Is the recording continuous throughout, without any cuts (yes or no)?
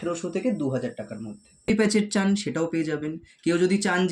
no